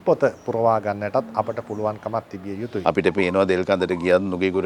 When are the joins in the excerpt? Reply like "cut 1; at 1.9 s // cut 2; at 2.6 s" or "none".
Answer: cut 1; at 2.7 s

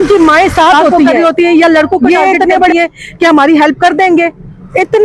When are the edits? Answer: cut 1; at 1.0 s

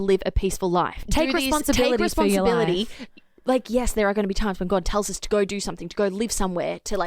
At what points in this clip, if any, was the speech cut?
cut 1; at 1.0 s

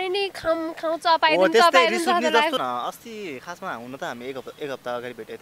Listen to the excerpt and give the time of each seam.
cut 1; at 2.6 s

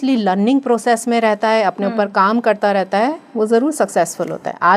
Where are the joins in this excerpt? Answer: none

